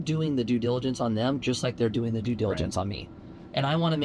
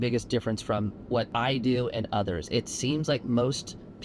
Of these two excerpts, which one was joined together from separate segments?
second; 1 cut; at 1.3 s

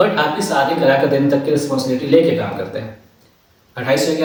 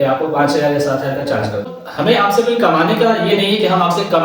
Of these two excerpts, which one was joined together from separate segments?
second; 1 cut; at 1.6 s

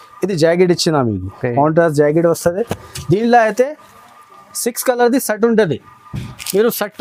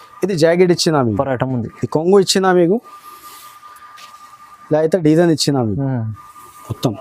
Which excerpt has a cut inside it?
second; 1 cut; at 1.1 s

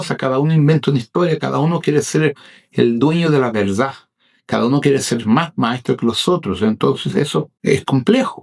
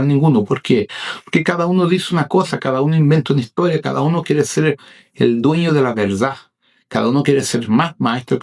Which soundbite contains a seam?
first; 1 cut; at 7.5 s

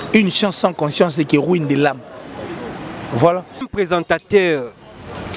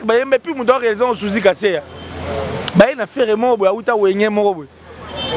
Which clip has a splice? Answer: first; 1 cut; at 3.6 s

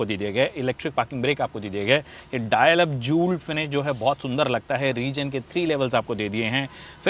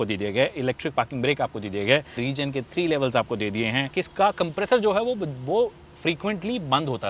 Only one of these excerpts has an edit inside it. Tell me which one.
second; 2 cuts; at 2.2 s, 4.0 s

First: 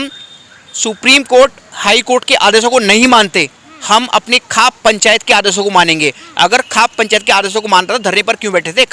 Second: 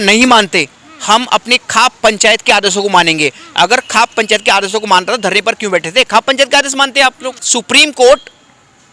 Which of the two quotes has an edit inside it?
second; 1 cut; at 7.4 s

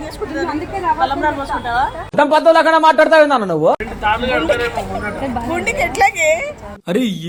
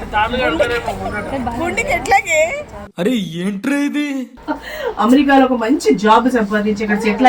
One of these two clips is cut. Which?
second; 1 cut; at 4.3 s

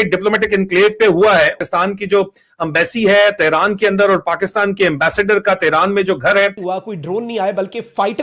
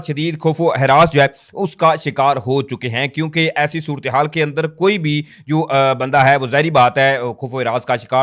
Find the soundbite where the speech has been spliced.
first; 2 cuts; at 1.6 s, 6.6 s

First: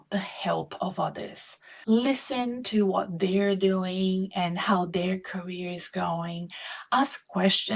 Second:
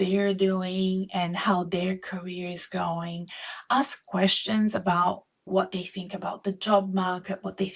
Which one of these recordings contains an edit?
second; 1 cut; at 5.5 s

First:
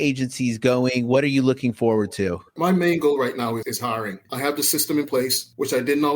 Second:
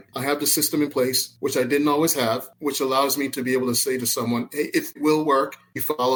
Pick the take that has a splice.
first; 1 cut; at 2.4 s

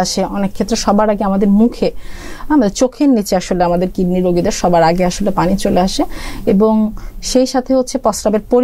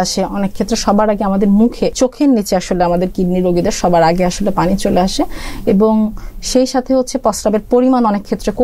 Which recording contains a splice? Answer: second; 1 cut; at 1.9 s

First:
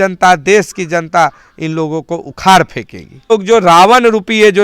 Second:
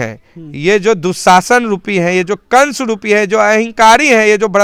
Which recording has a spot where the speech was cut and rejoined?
first; 1 cut; at 3.3 s

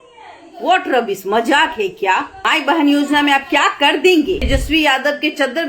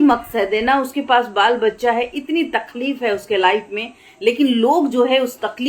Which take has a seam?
first; 1 cut; at 4.5 s

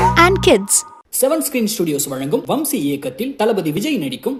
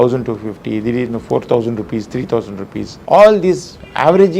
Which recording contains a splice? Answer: second; 1 cut; at 2.9 s

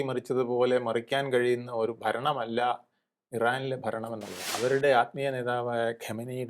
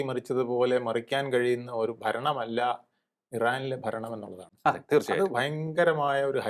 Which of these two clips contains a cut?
first; 1 cut; at 4.5 s

